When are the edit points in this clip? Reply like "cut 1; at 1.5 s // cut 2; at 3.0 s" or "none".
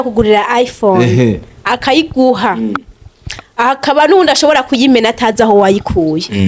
none